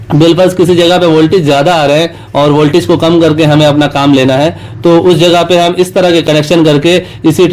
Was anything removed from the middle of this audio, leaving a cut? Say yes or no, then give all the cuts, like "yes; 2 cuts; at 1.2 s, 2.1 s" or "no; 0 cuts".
no; 0 cuts